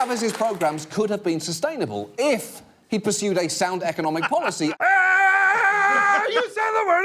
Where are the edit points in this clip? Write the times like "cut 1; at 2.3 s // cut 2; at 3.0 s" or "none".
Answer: cut 1; at 4.8 s